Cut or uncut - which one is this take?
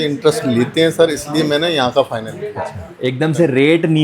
cut